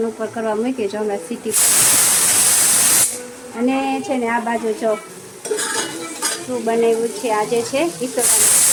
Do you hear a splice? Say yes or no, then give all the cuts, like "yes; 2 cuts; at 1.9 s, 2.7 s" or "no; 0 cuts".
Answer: no; 0 cuts